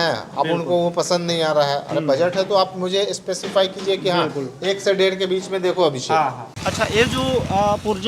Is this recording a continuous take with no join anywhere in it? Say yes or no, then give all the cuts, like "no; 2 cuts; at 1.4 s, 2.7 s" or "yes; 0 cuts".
no; 1 cut; at 6.5 s